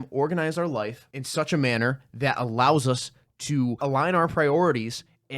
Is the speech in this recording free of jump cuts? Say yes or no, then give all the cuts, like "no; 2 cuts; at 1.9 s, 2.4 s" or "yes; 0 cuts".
no; 2 cuts; at 1.1 s, 3.8 s